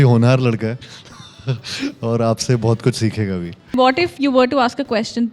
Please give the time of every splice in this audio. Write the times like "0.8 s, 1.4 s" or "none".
3.8 s